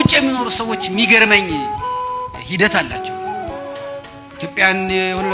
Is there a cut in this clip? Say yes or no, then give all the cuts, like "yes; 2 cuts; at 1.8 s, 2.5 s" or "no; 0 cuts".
no; 0 cuts